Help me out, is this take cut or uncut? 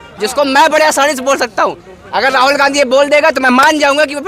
uncut